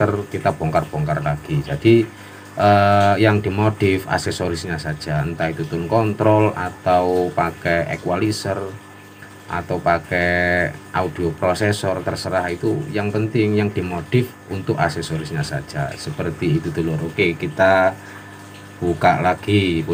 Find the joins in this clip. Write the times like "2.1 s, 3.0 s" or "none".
none